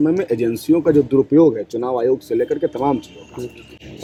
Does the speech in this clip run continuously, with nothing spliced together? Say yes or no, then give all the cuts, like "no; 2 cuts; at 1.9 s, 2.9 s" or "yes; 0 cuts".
yes; 0 cuts